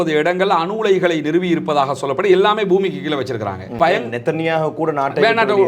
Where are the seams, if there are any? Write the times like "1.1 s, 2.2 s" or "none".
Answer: 3.7 s